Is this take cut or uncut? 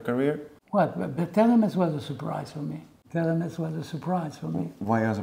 uncut